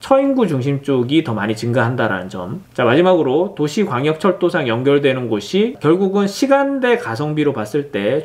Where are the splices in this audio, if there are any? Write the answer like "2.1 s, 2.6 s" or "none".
5.8 s